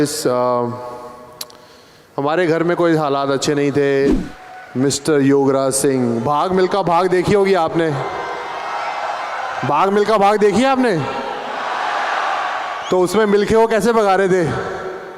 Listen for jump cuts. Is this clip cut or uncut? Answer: cut